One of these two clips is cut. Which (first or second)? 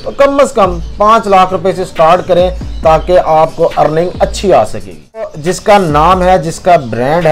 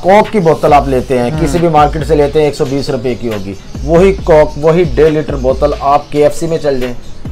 first